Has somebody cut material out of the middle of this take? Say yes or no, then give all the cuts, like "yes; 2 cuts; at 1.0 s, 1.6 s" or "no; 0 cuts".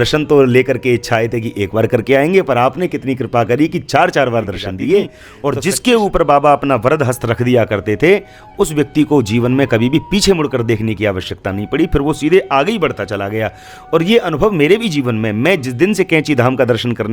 yes; 1 cut; at 5.2 s